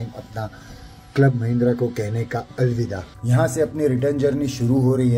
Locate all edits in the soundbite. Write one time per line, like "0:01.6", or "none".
none